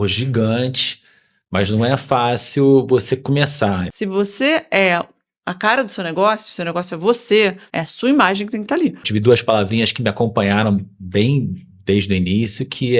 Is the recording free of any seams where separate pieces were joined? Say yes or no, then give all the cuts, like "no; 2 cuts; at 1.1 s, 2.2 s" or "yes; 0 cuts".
no; 3 cuts; at 3.9 s, 7.7 s, 9.1 s